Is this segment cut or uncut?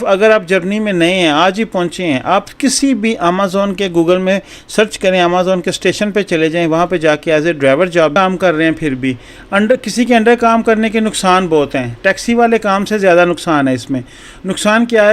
cut